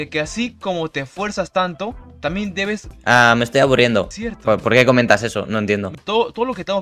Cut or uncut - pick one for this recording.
cut